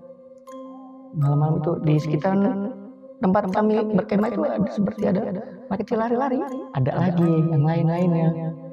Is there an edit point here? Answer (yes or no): yes